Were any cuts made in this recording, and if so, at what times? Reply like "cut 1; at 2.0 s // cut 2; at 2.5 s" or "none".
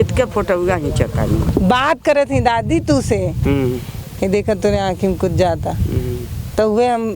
cut 1; at 1.5 s

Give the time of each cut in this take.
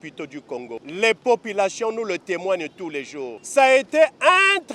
cut 1; at 0.8 s // cut 2; at 3.4 s

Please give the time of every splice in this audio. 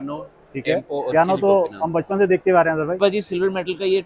cut 1; at 3.0 s

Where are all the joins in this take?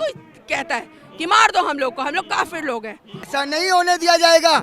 cut 1; at 3.3 s

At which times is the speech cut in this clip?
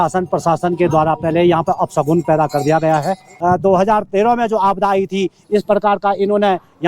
cut 1; at 3.3 s

